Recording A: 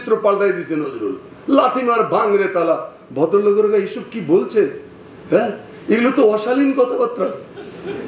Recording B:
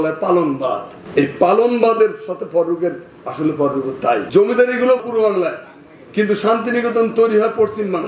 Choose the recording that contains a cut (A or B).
B